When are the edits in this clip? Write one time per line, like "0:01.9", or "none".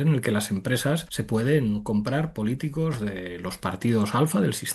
0:01.1